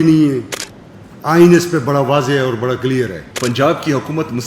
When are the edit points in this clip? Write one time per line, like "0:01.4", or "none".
0:03.2